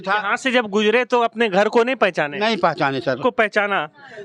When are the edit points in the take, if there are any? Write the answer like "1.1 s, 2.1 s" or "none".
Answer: 3.2 s